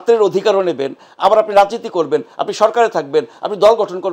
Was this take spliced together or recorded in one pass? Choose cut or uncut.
uncut